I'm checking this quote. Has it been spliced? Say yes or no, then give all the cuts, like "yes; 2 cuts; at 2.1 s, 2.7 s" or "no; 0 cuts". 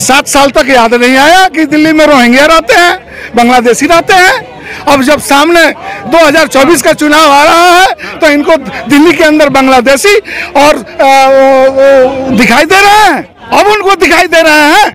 yes; 1 cut; at 13.3 s